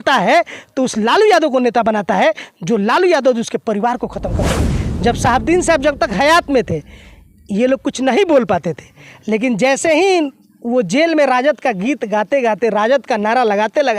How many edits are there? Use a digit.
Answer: 1